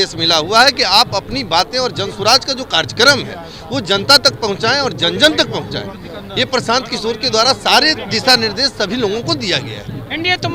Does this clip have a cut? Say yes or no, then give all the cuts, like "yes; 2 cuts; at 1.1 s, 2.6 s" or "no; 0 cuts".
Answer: no; 0 cuts